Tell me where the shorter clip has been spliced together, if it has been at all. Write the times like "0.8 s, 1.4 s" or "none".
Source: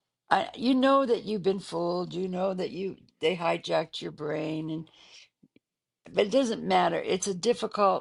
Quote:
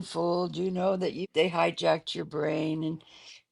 1.2 s